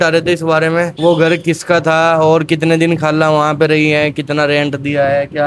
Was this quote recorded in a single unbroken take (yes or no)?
no